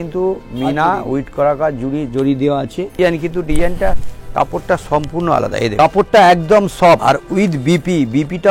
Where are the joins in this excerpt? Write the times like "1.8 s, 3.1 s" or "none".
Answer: 3.0 s, 5.7 s, 7.0 s